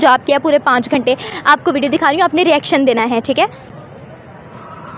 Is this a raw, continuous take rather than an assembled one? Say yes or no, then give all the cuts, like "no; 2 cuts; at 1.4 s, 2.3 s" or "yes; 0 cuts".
yes; 0 cuts